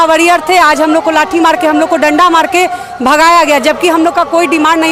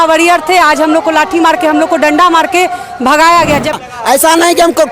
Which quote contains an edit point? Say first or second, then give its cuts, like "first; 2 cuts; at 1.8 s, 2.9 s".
second; 1 cut; at 3.8 s